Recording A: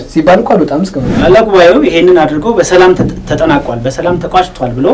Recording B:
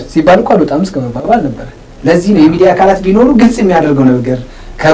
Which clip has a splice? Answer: A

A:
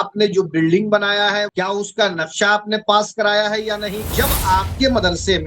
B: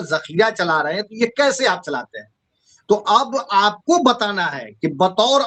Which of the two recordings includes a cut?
A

